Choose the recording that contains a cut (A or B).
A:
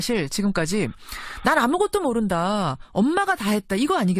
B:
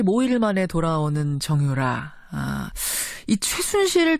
B